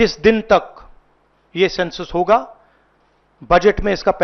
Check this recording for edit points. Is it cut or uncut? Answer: uncut